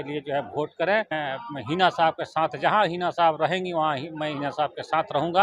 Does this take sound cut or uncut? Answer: cut